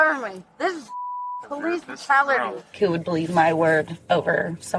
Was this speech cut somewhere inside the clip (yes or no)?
yes